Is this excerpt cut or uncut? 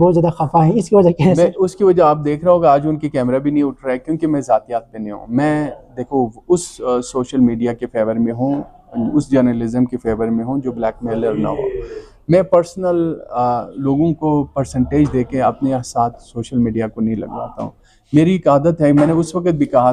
uncut